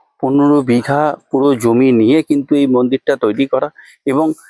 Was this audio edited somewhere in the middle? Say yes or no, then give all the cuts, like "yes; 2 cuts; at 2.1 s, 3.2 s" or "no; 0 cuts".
no; 0 cuts